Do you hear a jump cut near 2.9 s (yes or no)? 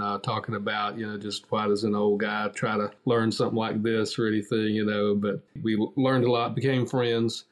yes